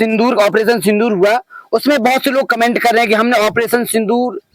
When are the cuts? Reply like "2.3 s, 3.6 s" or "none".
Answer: none